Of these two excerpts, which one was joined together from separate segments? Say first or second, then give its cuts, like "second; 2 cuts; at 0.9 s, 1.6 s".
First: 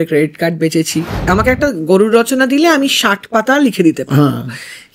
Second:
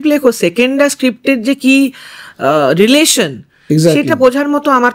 first; 1 cut; at 1.3 s